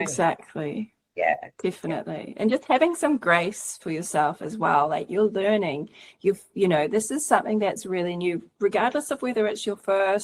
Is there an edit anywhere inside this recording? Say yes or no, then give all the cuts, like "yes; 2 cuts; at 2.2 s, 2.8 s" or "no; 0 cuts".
no; 0 cuts